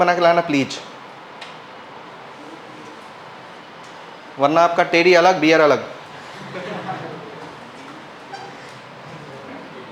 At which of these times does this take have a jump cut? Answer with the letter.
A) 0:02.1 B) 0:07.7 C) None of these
A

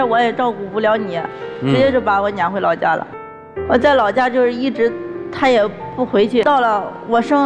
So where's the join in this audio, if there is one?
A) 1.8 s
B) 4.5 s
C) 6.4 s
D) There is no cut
C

